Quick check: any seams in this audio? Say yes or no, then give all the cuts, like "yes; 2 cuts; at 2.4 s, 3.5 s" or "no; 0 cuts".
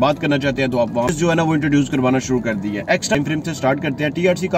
yes; 2 cuts; at 1.1 s, 3.1 s